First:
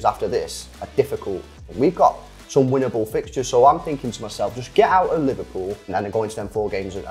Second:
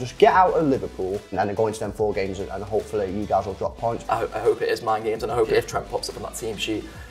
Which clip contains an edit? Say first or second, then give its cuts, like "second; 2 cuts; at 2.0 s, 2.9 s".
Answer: second; 2 cuts; at 4.0 s, 5.5 s